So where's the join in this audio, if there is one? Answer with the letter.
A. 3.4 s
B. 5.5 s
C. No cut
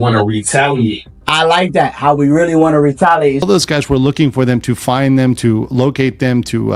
A